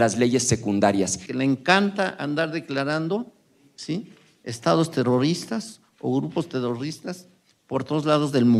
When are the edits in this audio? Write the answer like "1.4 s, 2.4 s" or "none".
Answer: 1.2 s